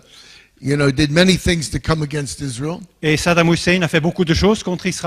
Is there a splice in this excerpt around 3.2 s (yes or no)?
yes